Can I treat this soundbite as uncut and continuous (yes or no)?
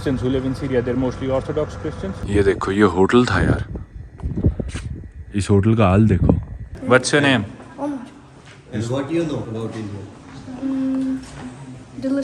no